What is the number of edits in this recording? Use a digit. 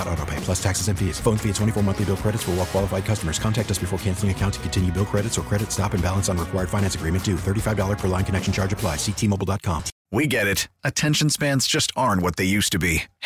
1